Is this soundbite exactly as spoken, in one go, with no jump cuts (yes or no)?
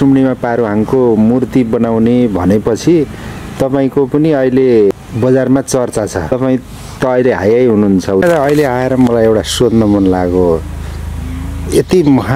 no